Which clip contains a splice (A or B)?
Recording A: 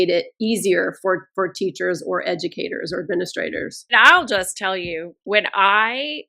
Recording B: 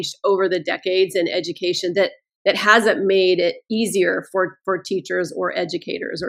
A